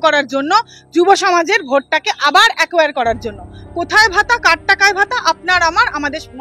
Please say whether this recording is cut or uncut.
uncut